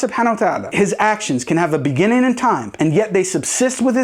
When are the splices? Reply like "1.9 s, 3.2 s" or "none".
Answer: none